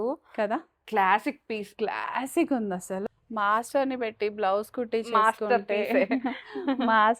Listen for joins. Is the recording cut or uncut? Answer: cut